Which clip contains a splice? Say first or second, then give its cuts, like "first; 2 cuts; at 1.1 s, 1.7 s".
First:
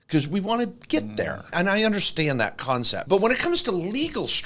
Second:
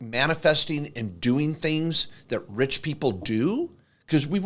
first; 2 cuts; at 1.5 s, 3.0 s